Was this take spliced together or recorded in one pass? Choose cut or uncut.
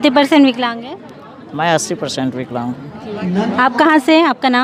uncut